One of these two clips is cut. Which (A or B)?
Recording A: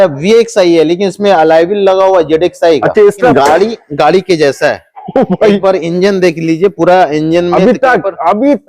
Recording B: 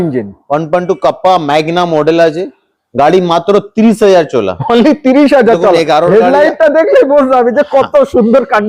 A